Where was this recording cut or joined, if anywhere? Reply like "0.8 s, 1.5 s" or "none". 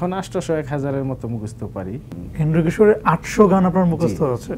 2.2 s